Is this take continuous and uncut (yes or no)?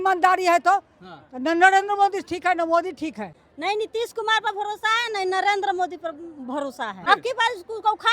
no